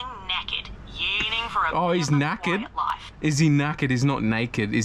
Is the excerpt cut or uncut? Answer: uncut